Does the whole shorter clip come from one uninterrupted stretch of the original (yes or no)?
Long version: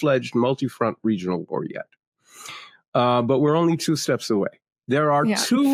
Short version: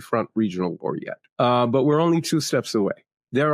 no